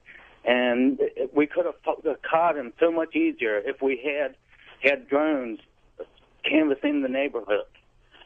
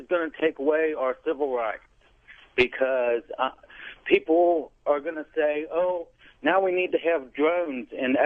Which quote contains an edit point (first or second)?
first